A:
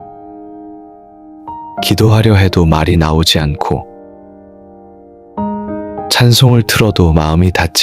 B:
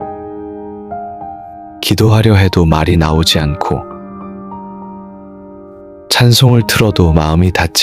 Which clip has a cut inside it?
A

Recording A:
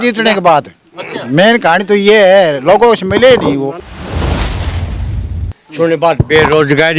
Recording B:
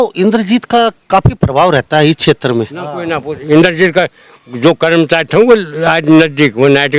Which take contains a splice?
A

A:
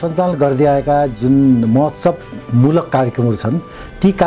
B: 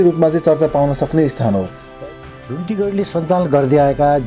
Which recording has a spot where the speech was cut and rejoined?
B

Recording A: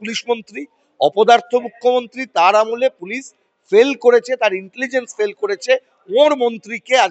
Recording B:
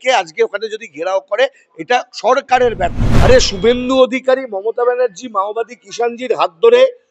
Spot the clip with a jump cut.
B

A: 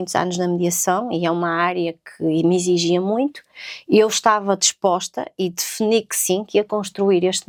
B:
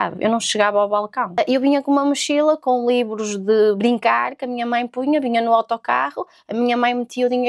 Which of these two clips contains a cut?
B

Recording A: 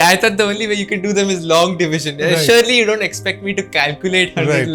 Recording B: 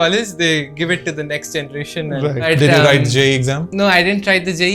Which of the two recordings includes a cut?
B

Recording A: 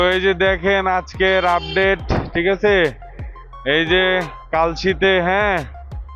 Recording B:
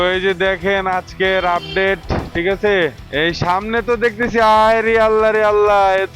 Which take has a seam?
B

